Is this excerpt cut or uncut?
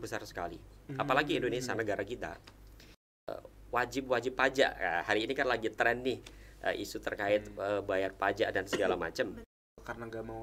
cut